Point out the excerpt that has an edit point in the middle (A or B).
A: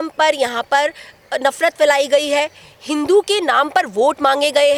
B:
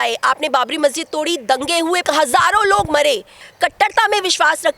B